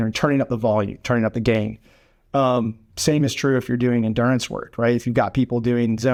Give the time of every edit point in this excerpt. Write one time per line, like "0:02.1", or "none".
none